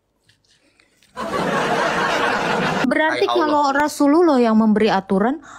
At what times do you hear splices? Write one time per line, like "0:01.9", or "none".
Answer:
0:02.8